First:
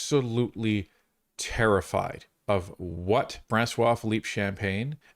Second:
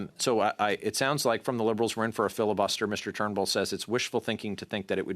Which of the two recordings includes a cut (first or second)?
first